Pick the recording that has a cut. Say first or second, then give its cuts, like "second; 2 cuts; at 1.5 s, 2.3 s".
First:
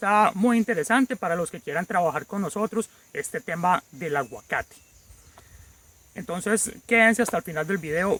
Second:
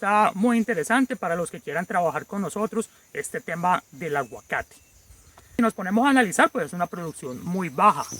second; 1 cut; at 5.6 s